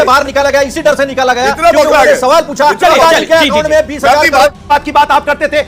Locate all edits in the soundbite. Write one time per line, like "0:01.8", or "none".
0:04.6